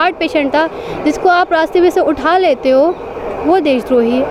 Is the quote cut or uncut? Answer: uncut